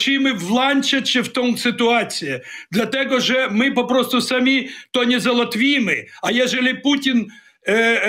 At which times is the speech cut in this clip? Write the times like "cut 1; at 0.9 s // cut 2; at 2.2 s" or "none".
none